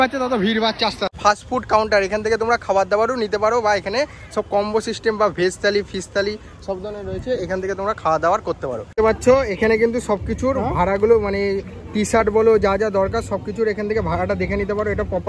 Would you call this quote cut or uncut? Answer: cut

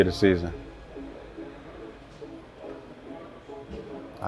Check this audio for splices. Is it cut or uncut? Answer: uncut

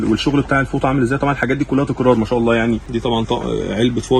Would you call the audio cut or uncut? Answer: cut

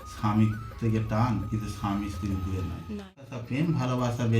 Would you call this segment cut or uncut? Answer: cut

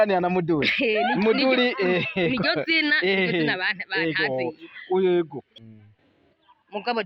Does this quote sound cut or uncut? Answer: cut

